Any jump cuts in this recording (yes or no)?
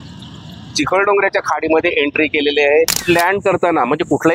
yes